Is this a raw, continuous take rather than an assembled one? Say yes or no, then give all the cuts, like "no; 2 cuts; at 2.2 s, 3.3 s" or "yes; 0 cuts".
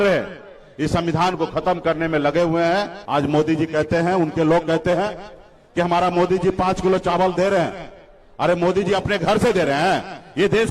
no; 1 cut; at 3.0 s